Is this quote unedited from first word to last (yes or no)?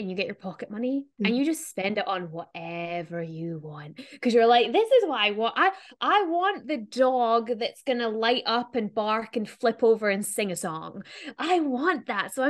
no